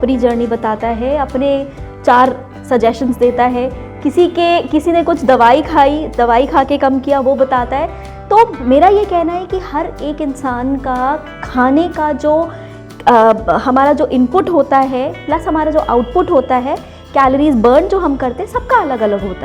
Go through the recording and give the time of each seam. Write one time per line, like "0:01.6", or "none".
none